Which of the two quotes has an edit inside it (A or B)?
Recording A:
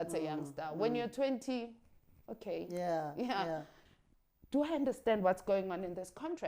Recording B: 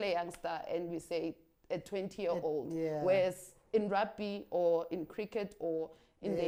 A